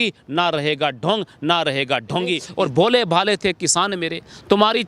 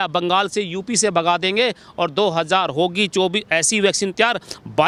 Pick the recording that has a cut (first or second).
first